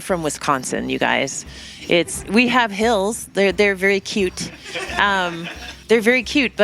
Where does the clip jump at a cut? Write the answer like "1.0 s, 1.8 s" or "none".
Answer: 5.7 s